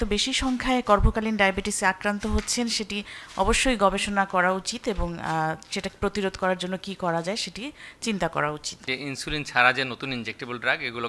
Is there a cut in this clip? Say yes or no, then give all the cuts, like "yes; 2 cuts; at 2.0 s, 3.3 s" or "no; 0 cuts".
yes; 1 cut; at 8.7 s